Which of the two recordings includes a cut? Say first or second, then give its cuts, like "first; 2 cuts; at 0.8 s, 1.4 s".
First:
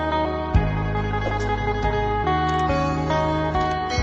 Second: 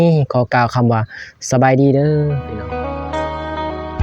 second; 1 cut; at 2.4 s